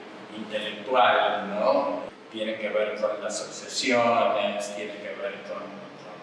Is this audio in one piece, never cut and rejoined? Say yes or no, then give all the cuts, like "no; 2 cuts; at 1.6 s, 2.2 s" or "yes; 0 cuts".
no; 1 cut; at 2.1 s